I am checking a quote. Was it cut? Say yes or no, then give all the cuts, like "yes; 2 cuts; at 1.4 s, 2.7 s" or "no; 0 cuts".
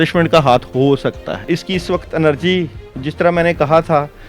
yes; 1 cut; at 1.5 s